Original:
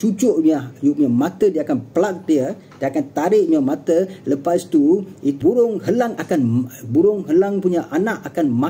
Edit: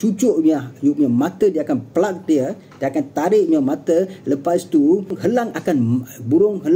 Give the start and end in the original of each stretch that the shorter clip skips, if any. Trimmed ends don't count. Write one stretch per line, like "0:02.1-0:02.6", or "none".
0:05.1-0:05.8